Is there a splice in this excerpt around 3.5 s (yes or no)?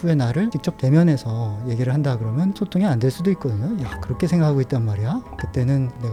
no